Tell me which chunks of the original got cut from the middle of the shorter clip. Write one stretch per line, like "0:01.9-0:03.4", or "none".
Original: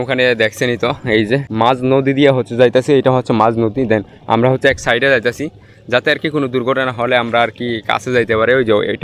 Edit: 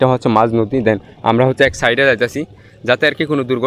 none